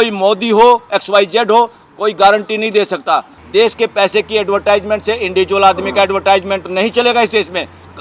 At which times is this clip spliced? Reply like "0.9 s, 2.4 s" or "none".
3.4 s